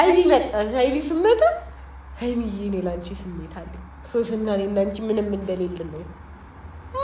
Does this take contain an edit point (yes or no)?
no